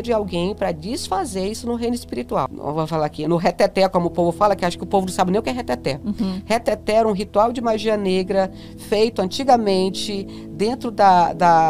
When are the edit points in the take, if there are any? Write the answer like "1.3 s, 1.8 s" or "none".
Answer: 2.5 s